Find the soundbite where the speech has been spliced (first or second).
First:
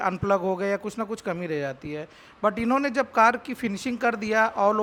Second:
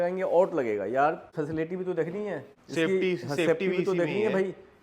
second